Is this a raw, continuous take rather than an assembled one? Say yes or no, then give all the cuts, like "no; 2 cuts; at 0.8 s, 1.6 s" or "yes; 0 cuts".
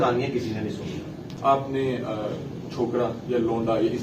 no; 1 cut; at 1.2 s